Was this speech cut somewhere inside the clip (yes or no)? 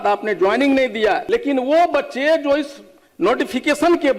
yes